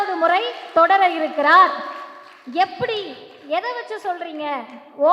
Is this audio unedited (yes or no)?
yes